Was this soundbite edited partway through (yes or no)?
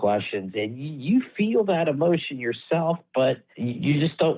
no